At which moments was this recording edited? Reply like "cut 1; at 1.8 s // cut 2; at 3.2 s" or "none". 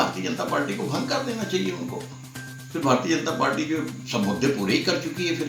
none